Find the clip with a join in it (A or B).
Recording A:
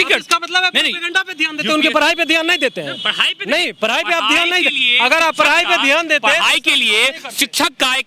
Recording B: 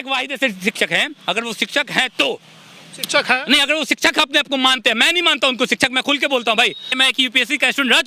B